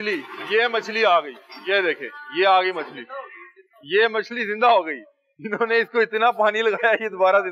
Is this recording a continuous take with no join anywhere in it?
yes; 0 cuts

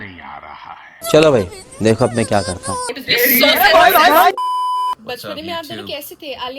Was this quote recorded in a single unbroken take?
no; 1 cut; at 5.0 s

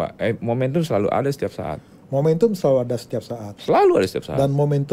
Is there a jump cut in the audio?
no; 0 cuts

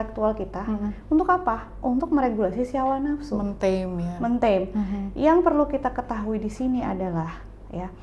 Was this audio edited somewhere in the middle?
no; 0 cuts

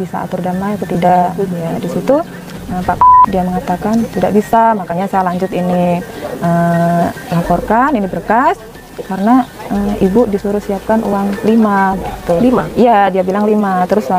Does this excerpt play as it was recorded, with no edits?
yes; 0 cuts

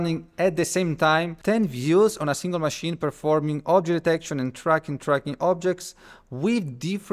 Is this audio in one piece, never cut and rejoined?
no; 1 cut; at 1.3 s

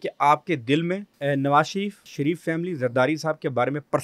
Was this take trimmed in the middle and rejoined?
yes; 2 cuts; at 1.1 s, 2.1 s

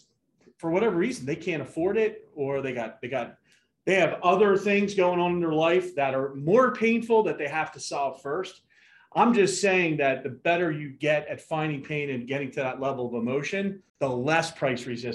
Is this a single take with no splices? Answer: no; 1 cut; at 13.8 s

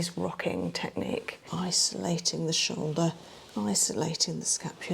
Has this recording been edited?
yes; 1 cut; at 1.4 s

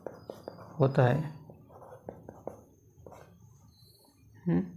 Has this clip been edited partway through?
no; 0 cuts

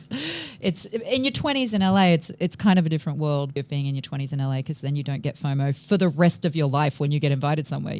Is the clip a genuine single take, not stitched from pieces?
no; 1 cut; at 3.5 s

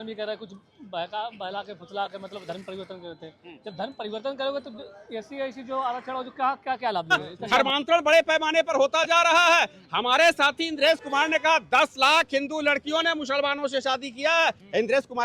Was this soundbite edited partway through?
yes; 1 cut; at 7.3 s

